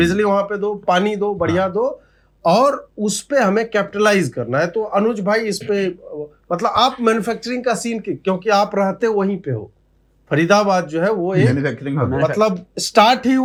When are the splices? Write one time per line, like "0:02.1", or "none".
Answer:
none